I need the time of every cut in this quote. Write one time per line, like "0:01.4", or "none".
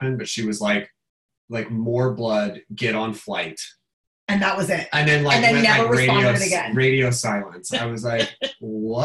0:01.3